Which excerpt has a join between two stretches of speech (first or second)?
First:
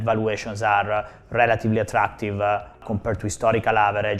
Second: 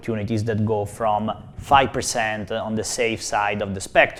first